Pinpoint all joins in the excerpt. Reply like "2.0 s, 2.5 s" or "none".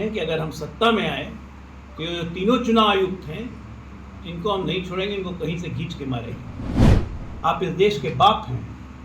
7.0 s